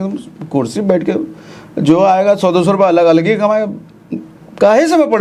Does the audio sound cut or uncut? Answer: uncut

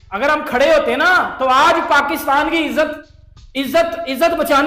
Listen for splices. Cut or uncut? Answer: uncut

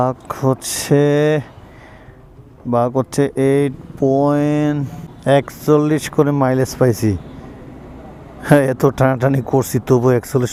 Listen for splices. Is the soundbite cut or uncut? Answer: uncut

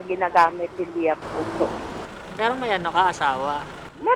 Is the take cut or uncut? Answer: cut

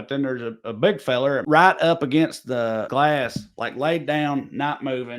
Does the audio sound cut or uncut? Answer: cut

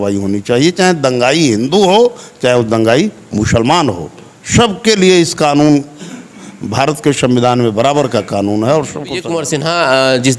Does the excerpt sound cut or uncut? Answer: cut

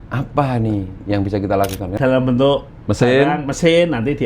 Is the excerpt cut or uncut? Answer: cut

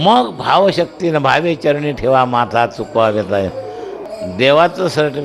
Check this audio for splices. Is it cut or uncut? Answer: cut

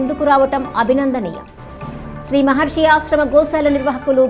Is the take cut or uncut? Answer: uncut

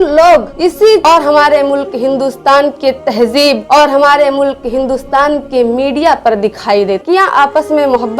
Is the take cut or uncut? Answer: cut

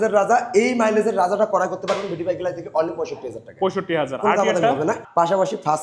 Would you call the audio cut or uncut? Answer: uncut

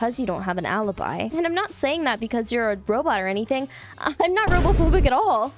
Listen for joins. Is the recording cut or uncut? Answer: cut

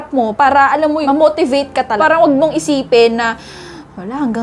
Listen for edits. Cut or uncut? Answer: cut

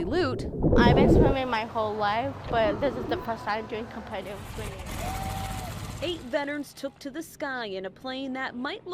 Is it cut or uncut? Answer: cut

